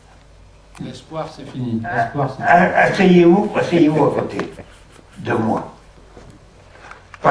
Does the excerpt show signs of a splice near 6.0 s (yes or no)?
yes